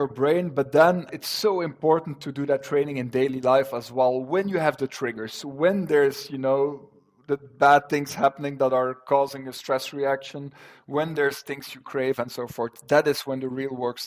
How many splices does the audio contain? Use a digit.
1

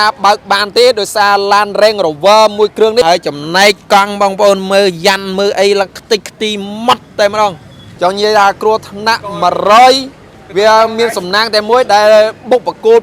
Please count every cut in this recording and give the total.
2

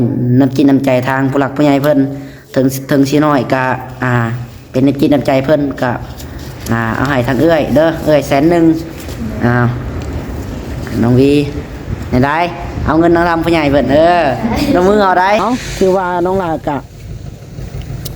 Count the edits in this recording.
1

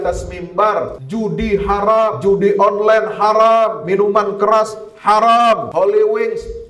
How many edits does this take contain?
4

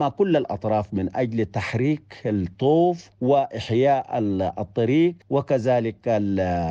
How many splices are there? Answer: 2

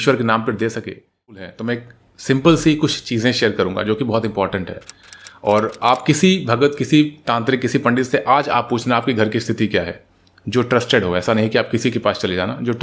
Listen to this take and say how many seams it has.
1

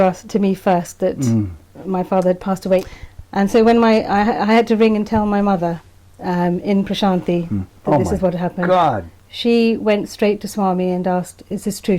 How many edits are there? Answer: 1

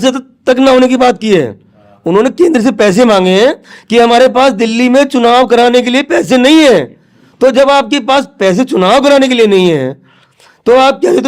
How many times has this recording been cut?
0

